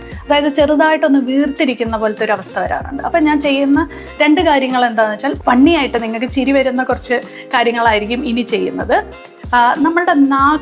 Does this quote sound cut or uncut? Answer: cut